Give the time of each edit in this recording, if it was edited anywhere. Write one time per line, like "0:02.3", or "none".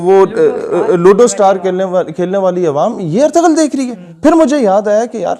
none